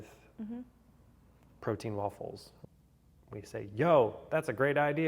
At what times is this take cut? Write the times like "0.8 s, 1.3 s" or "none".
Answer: 2.5 s